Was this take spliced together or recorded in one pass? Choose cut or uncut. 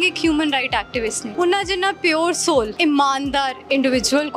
cut